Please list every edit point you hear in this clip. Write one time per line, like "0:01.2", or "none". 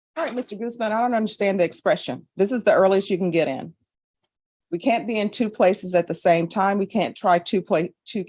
none